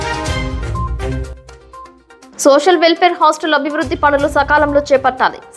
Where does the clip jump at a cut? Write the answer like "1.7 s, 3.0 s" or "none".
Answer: 1.1 s